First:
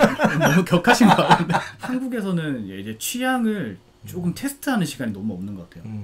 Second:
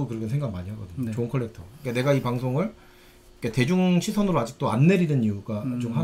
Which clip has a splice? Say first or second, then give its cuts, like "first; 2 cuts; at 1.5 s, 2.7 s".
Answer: first; 1 cut; at 1.8 s